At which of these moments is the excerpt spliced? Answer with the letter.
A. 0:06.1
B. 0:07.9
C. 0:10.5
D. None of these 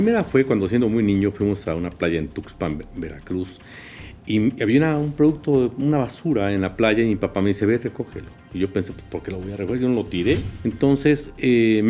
C